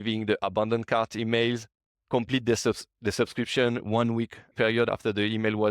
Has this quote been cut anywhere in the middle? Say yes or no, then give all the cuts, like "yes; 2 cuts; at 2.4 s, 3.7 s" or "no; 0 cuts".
yes; 1 cut; at 4.5 s